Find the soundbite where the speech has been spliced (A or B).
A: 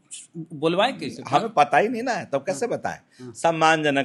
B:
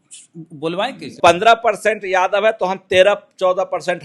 B